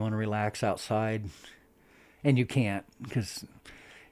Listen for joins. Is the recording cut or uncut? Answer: uncut